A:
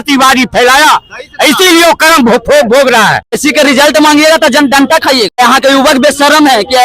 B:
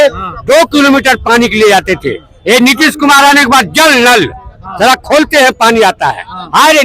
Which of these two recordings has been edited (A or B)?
A